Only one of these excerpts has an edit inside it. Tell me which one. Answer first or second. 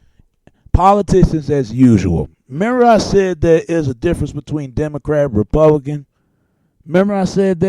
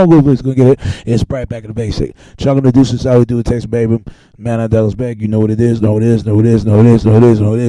first